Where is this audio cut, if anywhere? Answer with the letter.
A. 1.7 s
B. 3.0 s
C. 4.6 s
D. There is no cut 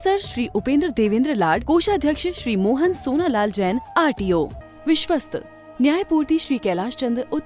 C